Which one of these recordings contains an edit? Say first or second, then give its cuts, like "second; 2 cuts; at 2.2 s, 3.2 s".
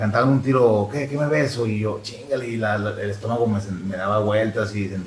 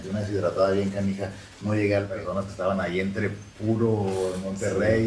second; 1 cut; at 2.1 s